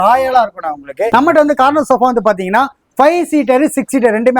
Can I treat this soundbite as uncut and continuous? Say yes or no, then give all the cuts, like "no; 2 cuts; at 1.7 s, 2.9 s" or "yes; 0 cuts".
no; 1 cut; at 1.1 s